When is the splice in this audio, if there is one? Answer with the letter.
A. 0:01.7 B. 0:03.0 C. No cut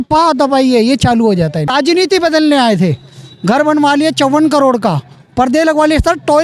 A